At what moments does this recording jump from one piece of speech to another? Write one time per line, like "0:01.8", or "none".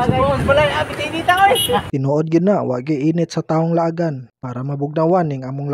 0:01.9

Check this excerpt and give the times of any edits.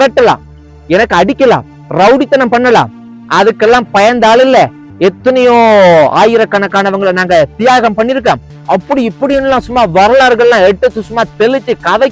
none

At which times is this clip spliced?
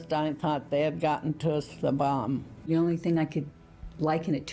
0:02.7

